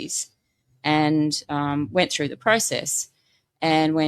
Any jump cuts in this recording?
no; 0 cuts

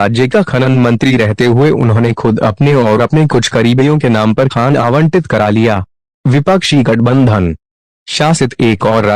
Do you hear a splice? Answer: yes; 1 cut; at 1.3 s

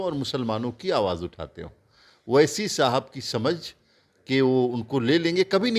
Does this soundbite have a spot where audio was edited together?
no; 0 cuts

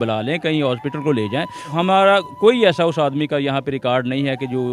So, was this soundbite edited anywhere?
yes; 1 cut; at 1.6 s

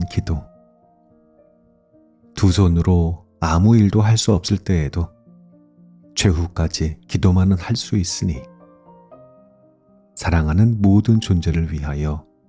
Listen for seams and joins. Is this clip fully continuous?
yes; 0 cuts

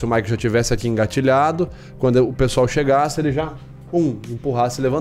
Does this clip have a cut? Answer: no; 0 cuts

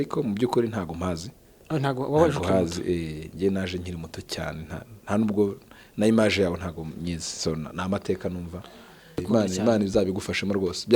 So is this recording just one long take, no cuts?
no; 1 cut; at 9.2 s

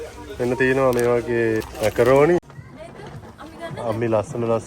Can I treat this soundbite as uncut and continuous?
no; 2 cuts; at 1.6 s, 2.4 s

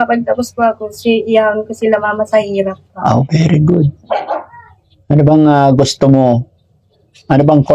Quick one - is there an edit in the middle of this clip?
no; 0 cuts

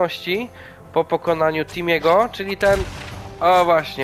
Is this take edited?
no; 0 cuts

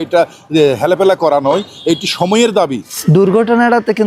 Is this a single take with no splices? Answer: no; 1 cut; at 2.9 s

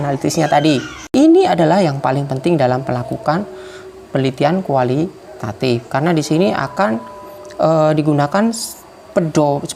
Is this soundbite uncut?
no; 1 cut; at 1.0 s

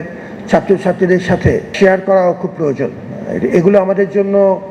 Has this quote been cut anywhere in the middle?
yes; 1 cut; at 1.7 s

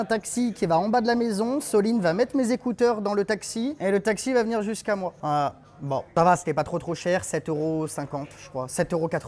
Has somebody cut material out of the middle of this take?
no; 0 cuts

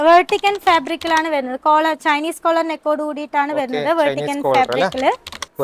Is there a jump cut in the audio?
no; 0 cuts

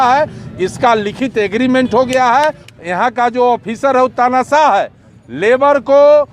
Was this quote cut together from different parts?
yes; 1 cut; at 2.7 s

